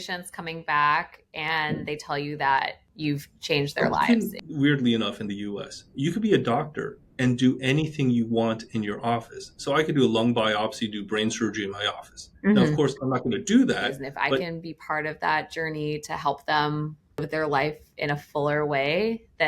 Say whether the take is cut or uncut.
cut